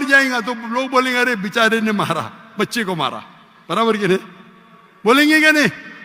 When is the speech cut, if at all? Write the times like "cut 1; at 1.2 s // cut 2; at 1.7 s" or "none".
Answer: none